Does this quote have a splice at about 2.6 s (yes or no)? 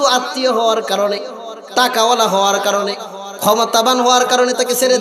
no